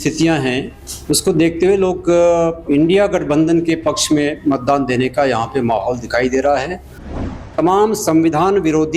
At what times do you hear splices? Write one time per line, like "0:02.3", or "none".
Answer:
0:07.3